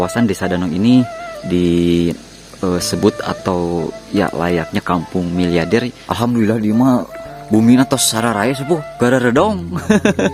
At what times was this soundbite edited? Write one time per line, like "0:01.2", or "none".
0:06.0